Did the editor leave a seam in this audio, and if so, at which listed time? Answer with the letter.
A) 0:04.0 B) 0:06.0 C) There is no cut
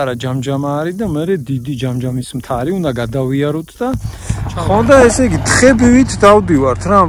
A